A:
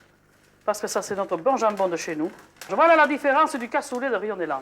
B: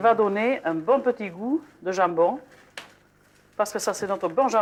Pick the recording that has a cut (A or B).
A